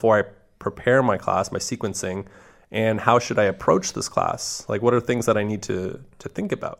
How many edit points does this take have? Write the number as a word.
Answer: zero